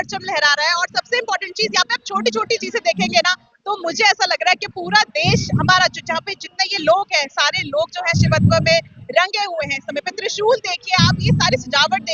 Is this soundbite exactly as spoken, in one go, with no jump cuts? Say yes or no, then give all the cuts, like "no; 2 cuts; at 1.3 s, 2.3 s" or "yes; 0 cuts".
yes; 0 cuts